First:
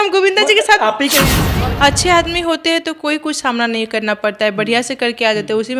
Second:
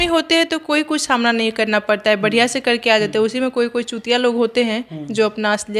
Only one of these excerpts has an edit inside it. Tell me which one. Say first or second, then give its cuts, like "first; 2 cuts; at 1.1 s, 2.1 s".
first; 1 cut; at 1.4 s